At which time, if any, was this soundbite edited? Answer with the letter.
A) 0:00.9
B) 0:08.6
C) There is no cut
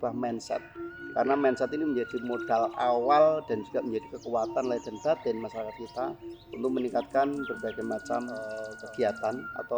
B